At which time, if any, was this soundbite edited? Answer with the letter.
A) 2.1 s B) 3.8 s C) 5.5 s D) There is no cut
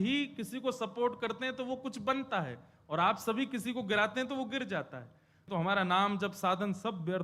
C